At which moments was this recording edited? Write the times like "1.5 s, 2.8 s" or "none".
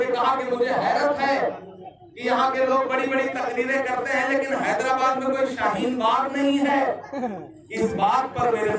none